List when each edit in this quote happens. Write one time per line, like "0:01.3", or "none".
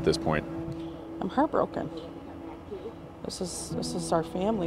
none